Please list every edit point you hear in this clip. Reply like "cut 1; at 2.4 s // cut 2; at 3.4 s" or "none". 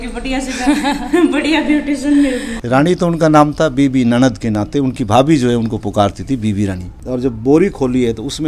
cut 1; at 2.6 s // cut 2; at 6.9 s